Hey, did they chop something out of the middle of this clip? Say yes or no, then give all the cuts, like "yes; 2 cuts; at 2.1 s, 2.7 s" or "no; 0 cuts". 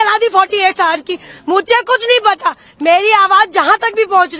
no; 0 cuts